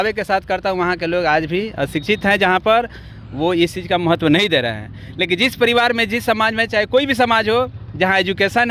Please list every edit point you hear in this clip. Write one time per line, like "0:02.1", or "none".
none